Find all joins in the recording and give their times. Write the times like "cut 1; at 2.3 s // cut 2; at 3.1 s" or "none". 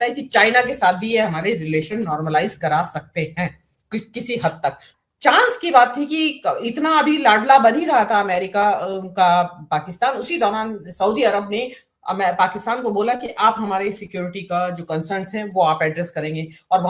cut 1; at 4.9 s